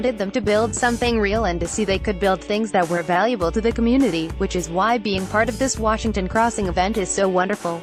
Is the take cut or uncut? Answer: uncut